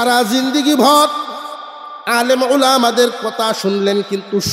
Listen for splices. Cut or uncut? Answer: uncut